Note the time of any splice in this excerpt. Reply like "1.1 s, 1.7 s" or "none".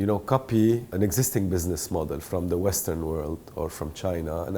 0.9 s